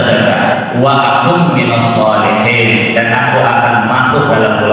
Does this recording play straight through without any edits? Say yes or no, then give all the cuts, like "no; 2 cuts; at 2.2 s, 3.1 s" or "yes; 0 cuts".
yes; 0 cuts